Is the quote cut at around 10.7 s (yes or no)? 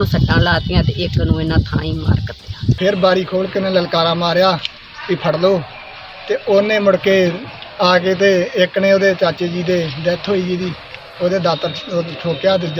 no